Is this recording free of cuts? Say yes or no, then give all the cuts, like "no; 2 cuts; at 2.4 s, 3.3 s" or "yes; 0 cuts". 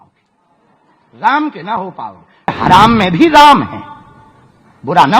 no; 1 cut; at 2.5 s